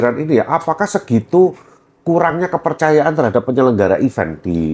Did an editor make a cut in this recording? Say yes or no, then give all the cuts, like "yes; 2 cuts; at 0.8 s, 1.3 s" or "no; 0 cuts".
no; 0 cuts